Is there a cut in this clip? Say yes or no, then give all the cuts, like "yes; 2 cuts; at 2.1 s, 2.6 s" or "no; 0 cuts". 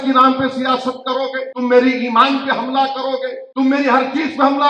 yes; 2 cuts; at 1.5 s, 3.4 s